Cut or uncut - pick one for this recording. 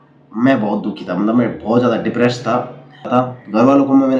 cut